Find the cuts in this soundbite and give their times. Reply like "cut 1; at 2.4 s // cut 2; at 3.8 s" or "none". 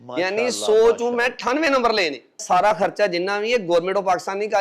cut 1; at 2.4 s